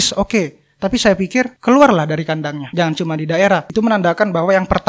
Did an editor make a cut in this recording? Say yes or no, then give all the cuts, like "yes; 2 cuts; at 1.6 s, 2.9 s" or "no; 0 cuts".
yes; 3 cuts; at 1.5 s, 2.6 s, 3.7 s